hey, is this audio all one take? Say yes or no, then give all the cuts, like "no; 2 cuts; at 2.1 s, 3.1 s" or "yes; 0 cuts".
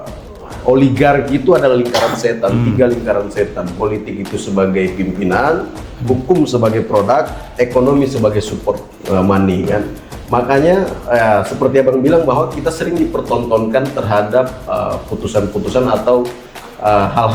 no; 1 cut; at 8.9 s